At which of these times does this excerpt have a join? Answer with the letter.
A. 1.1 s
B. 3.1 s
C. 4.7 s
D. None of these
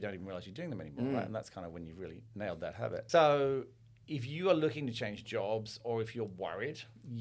B